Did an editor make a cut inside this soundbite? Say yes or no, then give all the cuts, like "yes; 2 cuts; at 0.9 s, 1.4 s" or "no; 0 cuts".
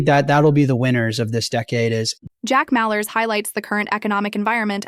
yes; 1 cut; at 2.1 s